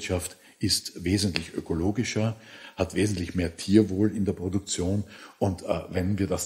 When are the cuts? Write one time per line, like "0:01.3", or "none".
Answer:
0:02.6
0:05.2